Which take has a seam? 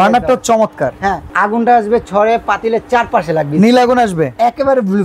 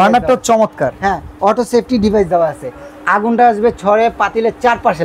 first; 1 cut; at 1.2 s

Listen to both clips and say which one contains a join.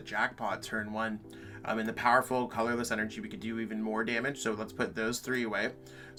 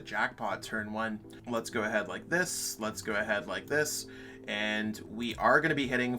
second; 1 cut; at 1.3 s

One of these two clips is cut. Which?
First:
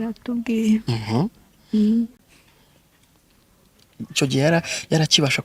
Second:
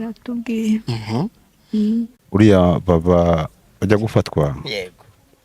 second; 1 cut; at 2.2 s

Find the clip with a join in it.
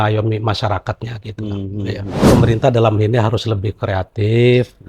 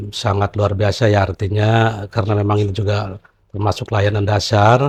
first; 1 cut; at 2.3 s

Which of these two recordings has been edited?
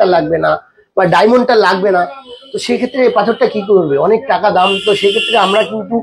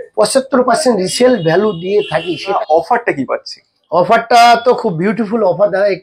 second; 1 cut; at 2.6 s

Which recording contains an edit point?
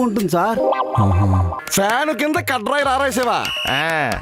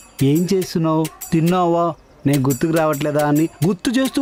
first; 1 cut; at 1.6 s

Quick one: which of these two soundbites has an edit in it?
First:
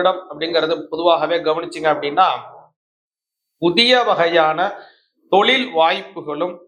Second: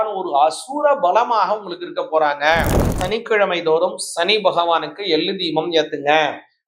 second; 1 cut; at 3.0 s

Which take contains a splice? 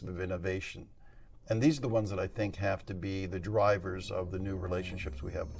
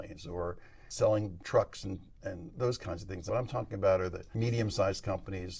second; 3 cuts; at 1.4 s, 3.1 s, 4.2 s

